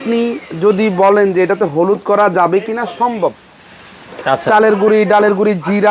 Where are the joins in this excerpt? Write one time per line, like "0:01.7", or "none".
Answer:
none